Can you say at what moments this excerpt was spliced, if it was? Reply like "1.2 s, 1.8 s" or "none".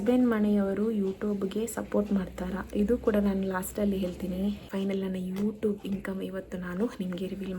4.6 s